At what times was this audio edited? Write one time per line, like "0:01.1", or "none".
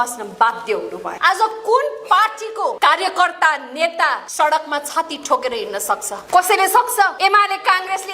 0:01.0
0:02.8
0:04.2
0:06.1
0:07.1